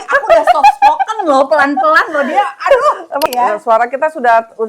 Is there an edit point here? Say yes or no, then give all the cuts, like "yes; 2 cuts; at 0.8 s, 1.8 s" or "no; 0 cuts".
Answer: yes; 1 cut; at 3.2 s